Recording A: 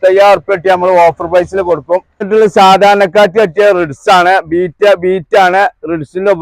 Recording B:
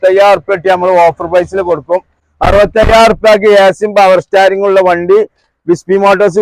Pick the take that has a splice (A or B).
A